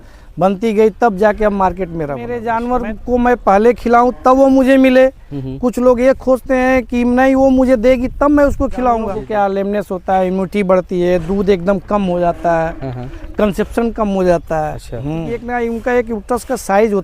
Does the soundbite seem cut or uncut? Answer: cut